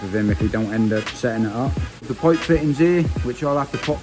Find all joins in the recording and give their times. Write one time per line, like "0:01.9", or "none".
0:02.1